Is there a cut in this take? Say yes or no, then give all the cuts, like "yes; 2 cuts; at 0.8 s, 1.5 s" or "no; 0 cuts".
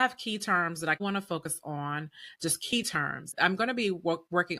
yes; 2 cuts; at 1.0 s, 3.3 s